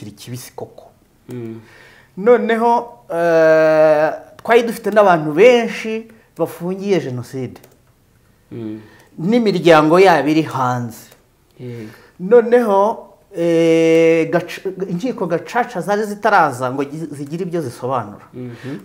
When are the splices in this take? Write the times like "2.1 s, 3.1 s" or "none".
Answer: none

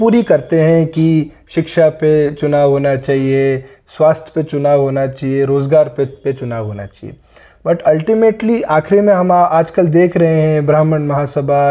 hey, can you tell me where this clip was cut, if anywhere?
none

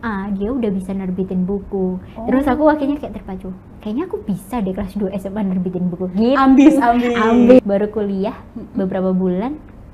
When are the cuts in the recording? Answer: 7.6 s

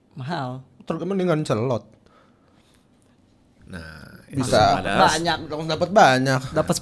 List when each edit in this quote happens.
none

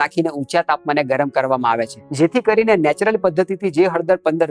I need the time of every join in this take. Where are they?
2.0 s

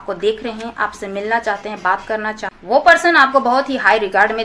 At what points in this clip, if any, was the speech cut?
2.5 s

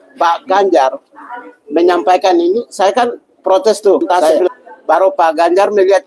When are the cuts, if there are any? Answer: 4.2 s

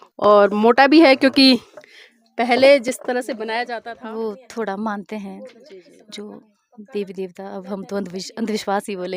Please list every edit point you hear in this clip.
3.7 s

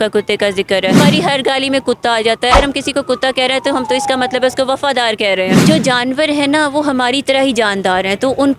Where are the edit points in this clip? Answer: 0.9 s, 2.5 s, 5.6 s

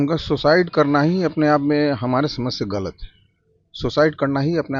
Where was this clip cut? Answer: none

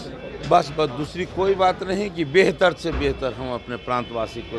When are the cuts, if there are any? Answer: none

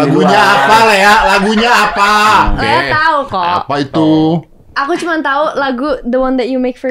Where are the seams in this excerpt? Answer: 2.6 s

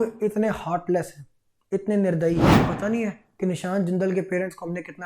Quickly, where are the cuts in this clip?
2.6 s

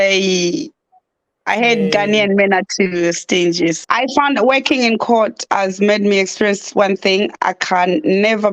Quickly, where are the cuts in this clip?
3.8 s

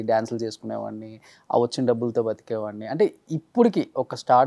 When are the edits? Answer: none

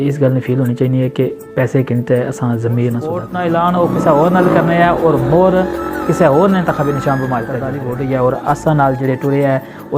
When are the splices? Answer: 3.3 s, 7.7 s

